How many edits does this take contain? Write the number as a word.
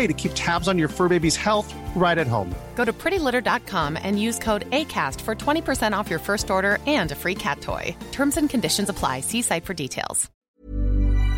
one